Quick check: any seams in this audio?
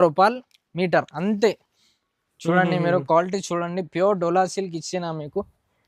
no; 0 cuts

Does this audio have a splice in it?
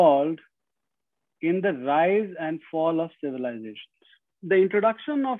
yes; 1 cut; at 4.3 s

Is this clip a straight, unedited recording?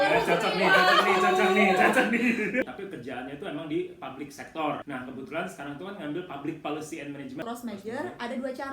no; 3 cuts; at 2.7 s, 4.8 s, 7.4 s

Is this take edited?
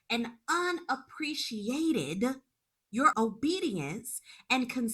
yes; 1 cut; at 3.1 s

